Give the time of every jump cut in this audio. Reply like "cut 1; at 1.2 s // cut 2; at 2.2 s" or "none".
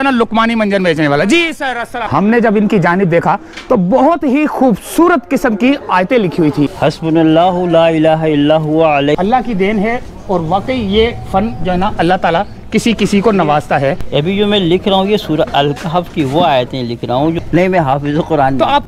cut 1; at 1.9 s // cut 2; at 6.7 s // cut 3; at 9.2 s // cut 4; at 14.0 s // cut 5; at 17.4 s